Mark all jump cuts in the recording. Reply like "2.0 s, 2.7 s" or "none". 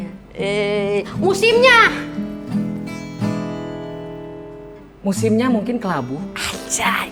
none